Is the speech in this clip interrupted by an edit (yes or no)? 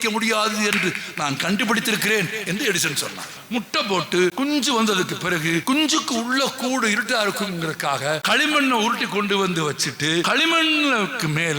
yes